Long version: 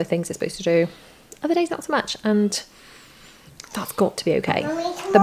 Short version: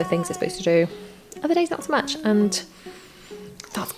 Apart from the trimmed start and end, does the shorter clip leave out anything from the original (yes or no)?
no